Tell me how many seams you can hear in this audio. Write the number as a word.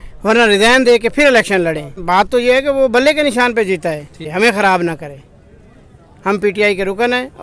two